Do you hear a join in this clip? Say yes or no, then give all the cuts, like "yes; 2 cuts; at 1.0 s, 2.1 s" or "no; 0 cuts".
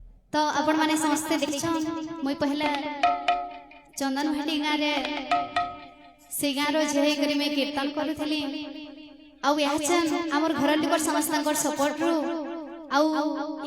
yes; 1 cut; at 1.5 s